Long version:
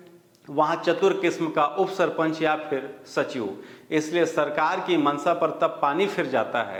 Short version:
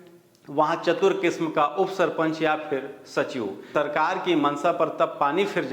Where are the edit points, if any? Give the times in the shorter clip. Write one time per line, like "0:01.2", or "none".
0:03.7